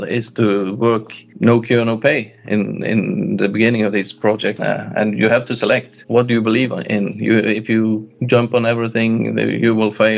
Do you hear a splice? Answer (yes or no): no